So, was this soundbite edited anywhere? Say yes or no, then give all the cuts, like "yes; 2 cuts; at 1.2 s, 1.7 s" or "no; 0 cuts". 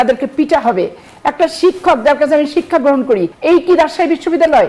yes; 1 cut; at 3.3 s